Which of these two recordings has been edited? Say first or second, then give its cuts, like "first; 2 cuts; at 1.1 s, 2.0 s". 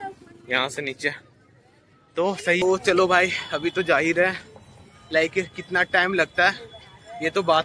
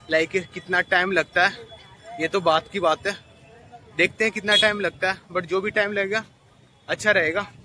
first; 1 cut; at 2.6 s